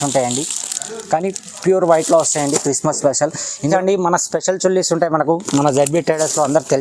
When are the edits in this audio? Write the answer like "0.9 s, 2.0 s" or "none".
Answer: 3.7 s

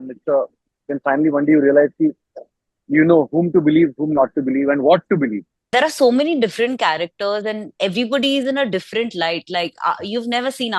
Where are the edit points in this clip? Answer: 5.5 s

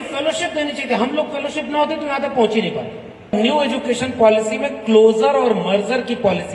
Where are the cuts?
3.3 s

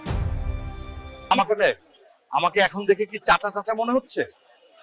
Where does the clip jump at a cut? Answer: 1.3 s

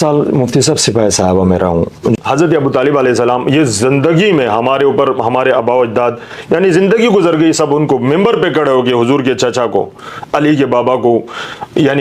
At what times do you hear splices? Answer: 2.2 s

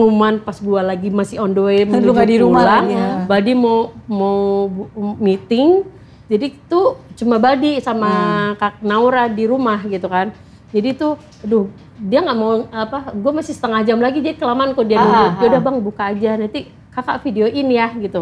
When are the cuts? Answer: none

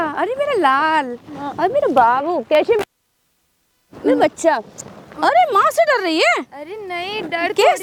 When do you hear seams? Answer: none

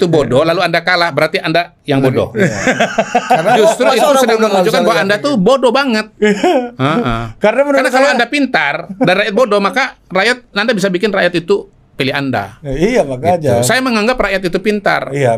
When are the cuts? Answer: none

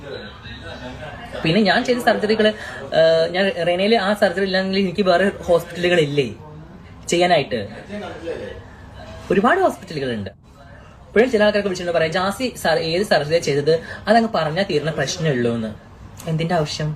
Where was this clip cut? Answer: none

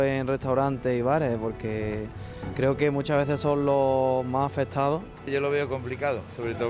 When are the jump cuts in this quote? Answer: 5.3 s

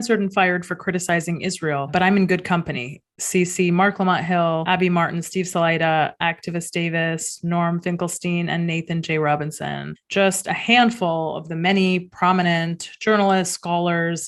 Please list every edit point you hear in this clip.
none

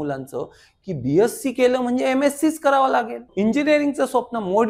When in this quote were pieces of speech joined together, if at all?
3.3 s

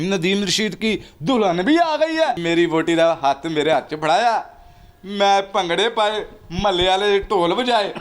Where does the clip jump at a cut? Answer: 2.4 s

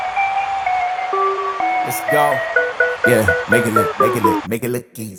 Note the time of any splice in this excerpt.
none

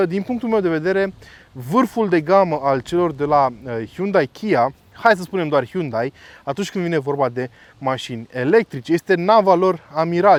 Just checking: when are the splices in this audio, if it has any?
none

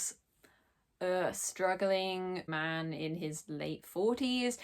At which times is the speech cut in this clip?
2.5 s

